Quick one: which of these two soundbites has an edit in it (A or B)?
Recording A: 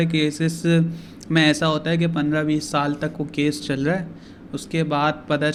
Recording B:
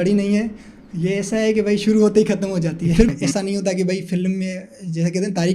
B